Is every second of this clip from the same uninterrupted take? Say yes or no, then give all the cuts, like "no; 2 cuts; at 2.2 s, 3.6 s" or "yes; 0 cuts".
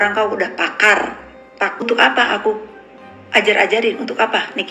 no; 1 cut; at 1.8 s